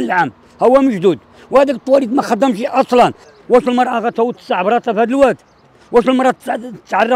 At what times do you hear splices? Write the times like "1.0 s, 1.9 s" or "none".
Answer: 3.3 s